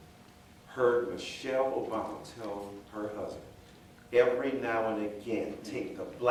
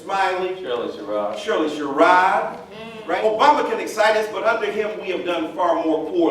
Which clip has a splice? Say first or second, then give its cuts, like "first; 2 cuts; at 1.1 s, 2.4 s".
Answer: second; 1 cut; at 3.1 s